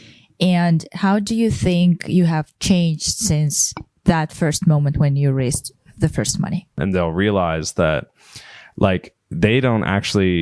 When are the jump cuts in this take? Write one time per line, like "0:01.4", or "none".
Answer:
0:06.8